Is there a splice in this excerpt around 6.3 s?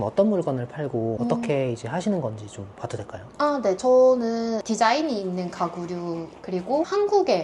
no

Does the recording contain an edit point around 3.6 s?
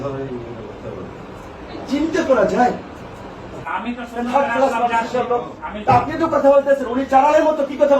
yes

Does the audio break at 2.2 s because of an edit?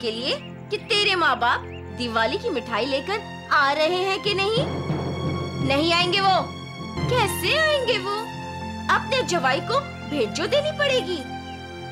no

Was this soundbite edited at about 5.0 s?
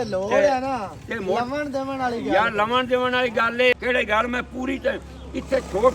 no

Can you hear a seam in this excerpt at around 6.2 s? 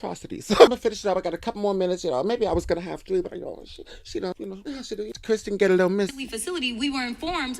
yes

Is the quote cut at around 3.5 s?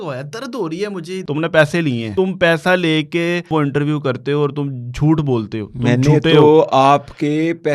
yes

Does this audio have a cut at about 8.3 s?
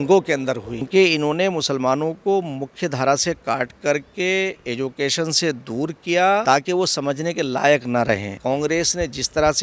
yes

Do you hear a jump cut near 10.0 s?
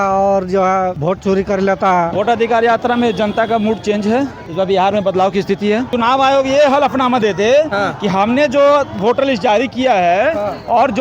no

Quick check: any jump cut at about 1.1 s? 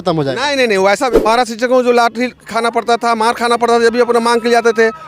yes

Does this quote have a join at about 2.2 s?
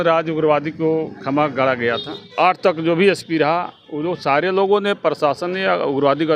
yes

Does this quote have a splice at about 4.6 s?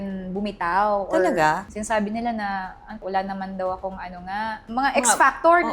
yes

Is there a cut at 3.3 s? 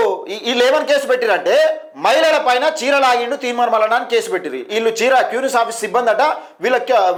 no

